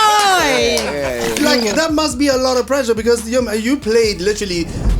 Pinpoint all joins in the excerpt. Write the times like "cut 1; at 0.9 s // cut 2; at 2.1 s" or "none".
cut 1; at 1.4 s